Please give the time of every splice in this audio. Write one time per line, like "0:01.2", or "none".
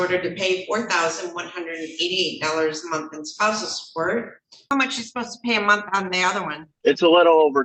0:04.5
0:06.6

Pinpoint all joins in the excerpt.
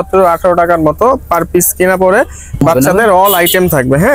0:02.6

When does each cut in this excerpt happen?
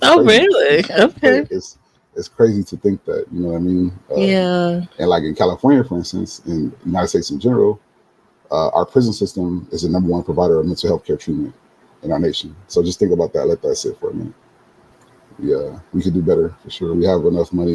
0:14.4

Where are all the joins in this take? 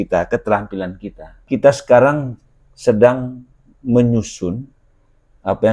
0:01.4

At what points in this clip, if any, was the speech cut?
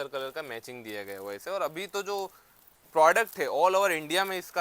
0:01.4

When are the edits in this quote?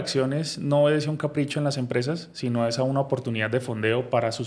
none

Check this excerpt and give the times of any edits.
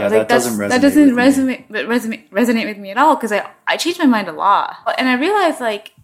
0:04.9

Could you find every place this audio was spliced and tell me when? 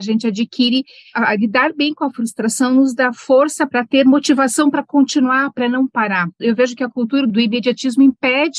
none

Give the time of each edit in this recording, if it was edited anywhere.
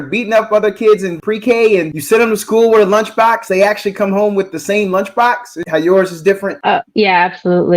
0:01.1
0:01.9
0:05.5
0:06.5

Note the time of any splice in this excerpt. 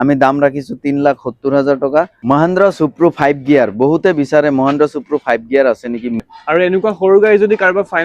0:02.2
0:06.2

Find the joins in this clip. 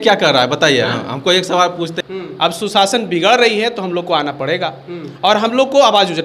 0:01.9

